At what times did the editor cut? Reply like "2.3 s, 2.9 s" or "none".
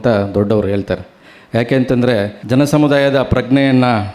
2.4 s